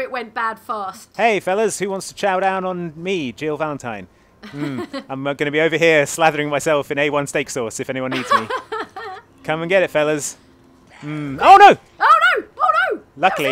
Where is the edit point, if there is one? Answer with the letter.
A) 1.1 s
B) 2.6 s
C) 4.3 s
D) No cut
A